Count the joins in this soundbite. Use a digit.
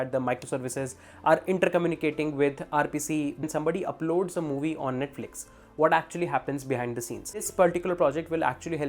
2